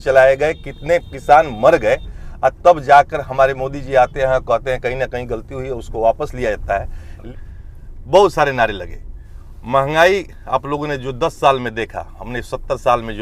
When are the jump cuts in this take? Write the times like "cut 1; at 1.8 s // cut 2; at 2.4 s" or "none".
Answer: cut 1; at 7.3 s